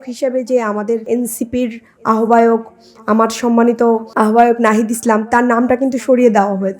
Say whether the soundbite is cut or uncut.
cut